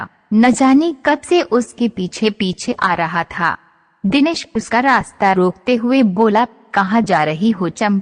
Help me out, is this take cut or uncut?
cut